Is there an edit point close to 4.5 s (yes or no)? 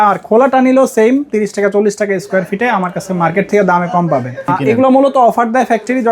yes